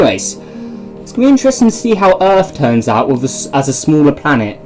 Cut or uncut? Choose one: cut